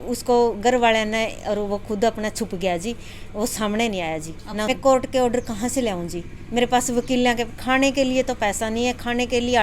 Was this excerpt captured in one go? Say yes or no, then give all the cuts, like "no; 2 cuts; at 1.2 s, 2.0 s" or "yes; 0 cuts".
no; 1 cut; at 4.7 s